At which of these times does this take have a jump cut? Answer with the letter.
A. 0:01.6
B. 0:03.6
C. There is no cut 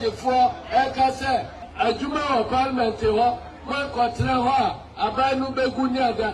A